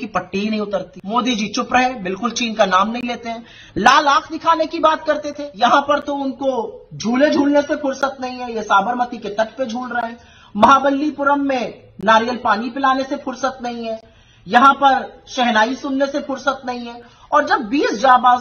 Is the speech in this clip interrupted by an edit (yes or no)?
yes